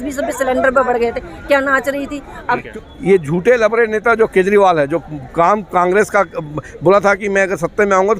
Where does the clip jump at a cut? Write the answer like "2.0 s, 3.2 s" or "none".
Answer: 2.6 s